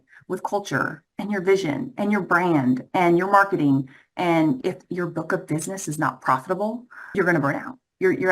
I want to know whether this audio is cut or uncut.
cut